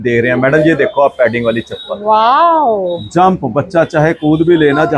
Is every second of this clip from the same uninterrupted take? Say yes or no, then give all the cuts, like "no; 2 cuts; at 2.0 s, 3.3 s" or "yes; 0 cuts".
yes; 0 cuts